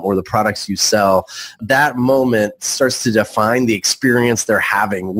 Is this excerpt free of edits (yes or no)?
no